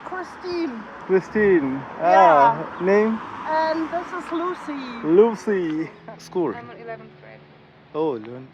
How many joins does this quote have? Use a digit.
1